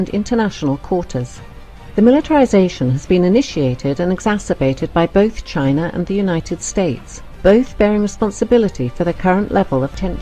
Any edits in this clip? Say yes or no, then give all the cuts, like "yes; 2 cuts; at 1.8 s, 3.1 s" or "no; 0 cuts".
yes; 1 cut; at 5.2 s